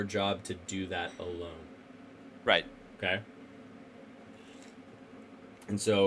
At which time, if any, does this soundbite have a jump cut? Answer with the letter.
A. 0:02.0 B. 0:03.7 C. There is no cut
C